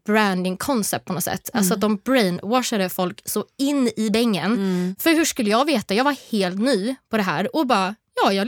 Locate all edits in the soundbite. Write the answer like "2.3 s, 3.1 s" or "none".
4.9 s